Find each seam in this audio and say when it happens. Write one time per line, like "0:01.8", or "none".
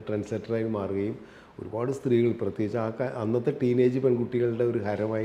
none